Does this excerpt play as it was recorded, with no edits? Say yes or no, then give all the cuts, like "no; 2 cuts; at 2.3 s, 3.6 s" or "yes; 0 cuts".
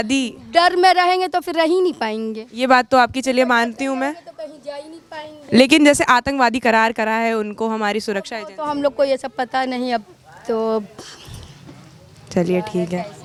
yes; 0 cuts